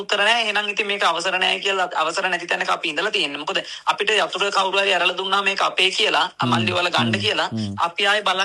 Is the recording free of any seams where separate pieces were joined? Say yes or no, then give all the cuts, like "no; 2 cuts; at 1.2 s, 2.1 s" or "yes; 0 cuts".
yes; 0 cuts